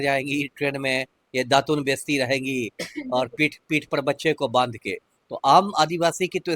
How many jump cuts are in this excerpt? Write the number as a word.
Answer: zero